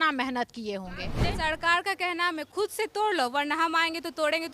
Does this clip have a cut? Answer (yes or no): yes